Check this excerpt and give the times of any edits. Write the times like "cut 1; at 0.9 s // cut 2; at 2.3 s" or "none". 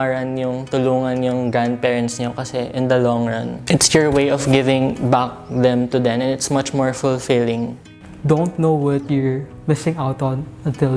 cut 1; at 3.5 s // cut 2; at 7.9 s